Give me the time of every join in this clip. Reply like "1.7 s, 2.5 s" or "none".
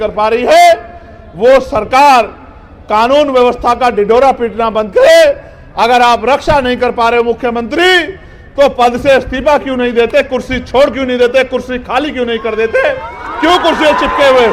none